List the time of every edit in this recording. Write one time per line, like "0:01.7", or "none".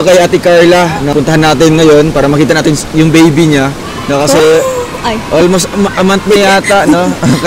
0:01.0